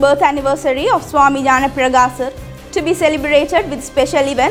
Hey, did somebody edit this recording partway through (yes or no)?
no